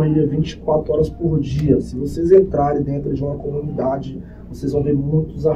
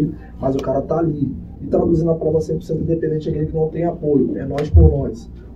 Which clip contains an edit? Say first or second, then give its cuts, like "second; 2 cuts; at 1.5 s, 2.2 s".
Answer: second; 1 cut; at 1.5 s